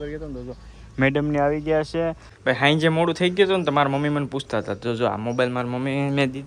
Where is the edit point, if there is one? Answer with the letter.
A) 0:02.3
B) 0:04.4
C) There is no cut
A